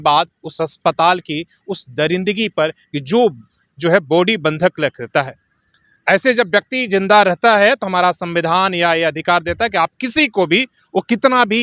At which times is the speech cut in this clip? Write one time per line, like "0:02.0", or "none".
none